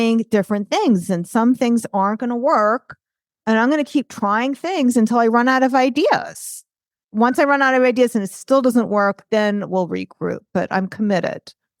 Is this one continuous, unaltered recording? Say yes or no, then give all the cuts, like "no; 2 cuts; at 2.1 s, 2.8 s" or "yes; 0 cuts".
yes; 0 cuts